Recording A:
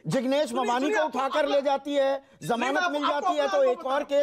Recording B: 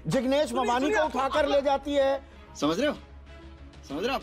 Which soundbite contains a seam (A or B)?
A